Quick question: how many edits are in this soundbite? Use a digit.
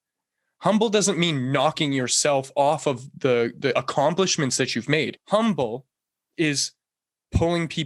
1